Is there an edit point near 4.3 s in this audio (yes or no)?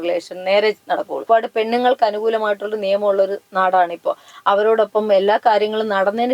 yes